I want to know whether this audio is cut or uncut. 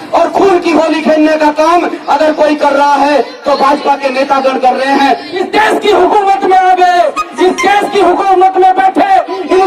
cut